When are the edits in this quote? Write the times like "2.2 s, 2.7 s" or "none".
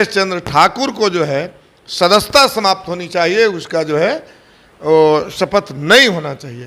none